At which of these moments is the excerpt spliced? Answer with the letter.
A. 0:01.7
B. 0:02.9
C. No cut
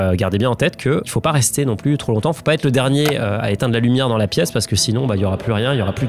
C